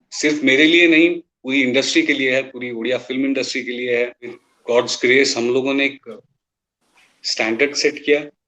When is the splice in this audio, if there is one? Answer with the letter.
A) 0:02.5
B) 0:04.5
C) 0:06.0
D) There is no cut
B